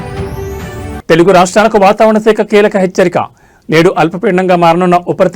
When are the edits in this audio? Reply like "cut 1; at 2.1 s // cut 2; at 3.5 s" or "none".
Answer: none